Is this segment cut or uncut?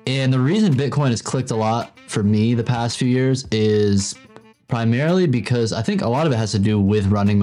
uncut